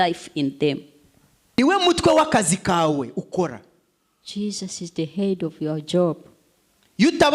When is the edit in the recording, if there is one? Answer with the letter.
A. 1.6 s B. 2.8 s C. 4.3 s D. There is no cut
A